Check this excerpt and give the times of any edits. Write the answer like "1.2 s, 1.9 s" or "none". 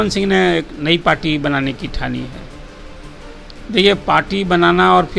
none